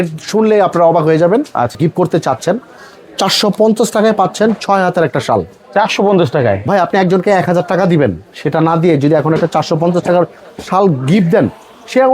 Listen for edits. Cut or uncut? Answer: cut